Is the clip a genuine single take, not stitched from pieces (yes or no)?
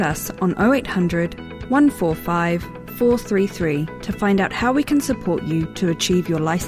yes